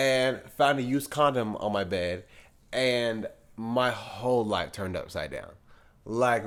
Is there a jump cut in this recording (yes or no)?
no